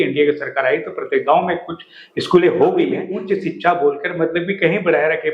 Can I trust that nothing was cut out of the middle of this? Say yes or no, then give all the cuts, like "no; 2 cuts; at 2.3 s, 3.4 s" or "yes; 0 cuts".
no; 1 cut; at 3.1 s